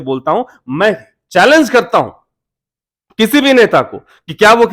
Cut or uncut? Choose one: uncut